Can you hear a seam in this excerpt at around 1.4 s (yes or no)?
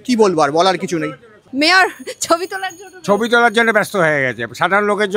yes